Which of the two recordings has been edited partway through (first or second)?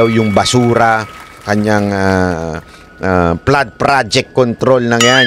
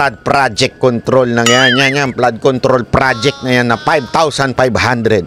first